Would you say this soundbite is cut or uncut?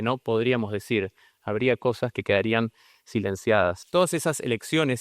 cut